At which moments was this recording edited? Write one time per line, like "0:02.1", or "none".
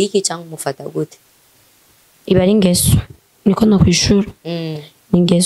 none